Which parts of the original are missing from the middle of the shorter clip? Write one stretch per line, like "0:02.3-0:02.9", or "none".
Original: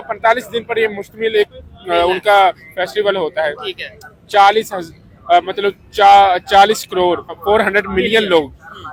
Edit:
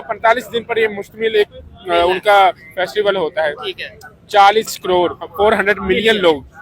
0:04.8-0:06.9